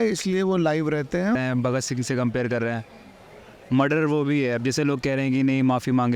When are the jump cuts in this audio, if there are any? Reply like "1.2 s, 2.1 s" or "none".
1.3 s